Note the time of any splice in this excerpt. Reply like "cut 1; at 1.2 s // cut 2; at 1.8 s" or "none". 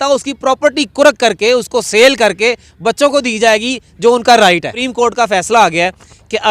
cut 1; at 4.8 s